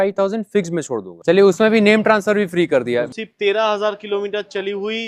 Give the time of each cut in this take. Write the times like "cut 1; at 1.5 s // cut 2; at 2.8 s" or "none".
cut 1; at 1.1 s // cut 2; at 3.1 s